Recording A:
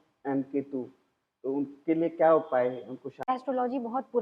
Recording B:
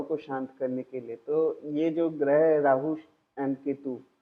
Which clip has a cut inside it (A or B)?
A